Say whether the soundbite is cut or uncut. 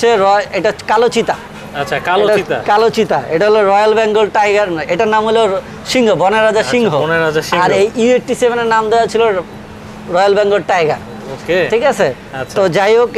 uncut